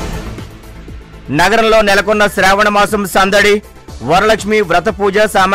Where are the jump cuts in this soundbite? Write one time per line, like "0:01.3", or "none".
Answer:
none